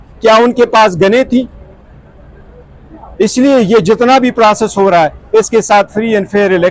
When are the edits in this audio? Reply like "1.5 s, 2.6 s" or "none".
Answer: none